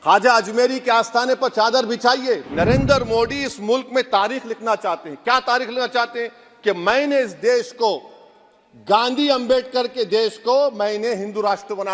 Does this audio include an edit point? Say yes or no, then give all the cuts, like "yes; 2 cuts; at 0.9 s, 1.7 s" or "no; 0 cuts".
yes; 1 cut; at 2.5 s